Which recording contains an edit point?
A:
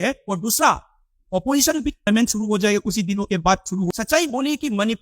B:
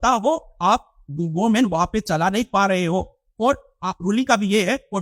A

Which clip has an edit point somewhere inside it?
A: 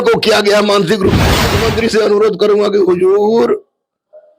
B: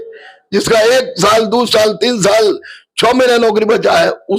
A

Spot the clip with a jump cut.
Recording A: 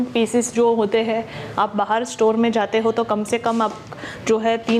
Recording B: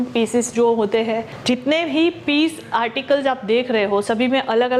B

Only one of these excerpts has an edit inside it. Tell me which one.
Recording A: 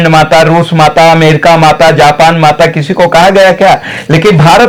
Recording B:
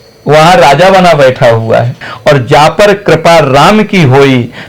B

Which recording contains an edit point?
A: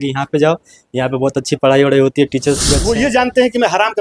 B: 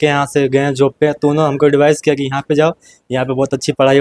A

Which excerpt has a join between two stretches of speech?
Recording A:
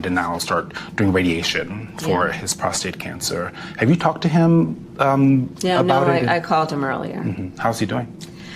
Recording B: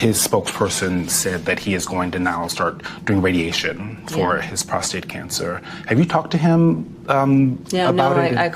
A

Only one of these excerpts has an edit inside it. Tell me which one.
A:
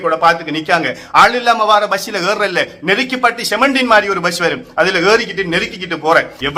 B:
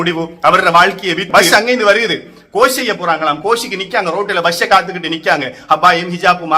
B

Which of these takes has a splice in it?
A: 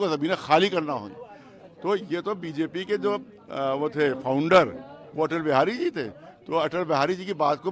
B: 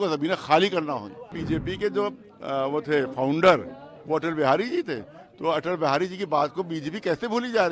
B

